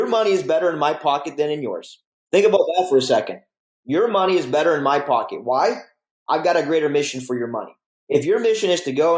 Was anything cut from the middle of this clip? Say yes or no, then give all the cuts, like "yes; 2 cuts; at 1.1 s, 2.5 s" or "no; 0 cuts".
yes; 1 cut; at 2.1 s